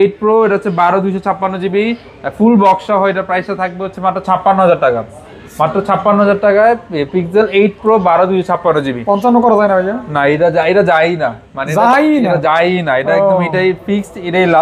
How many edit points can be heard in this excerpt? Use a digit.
0